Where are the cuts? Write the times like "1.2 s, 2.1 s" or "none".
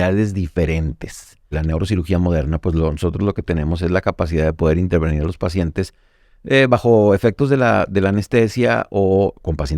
1.6 s